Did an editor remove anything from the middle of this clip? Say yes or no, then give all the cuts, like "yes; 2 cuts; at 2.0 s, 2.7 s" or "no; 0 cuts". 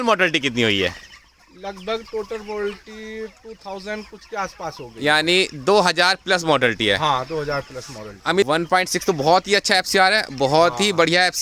yes; 1 cut; at 8.1 s